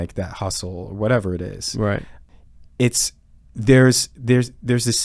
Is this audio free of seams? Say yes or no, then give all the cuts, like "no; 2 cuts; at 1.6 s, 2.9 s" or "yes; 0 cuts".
no; 1 cut; at 2.1 s